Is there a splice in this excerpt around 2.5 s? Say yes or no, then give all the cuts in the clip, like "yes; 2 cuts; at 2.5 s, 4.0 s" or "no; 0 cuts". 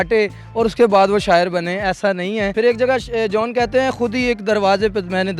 yes; 1 cut; at 2.5 s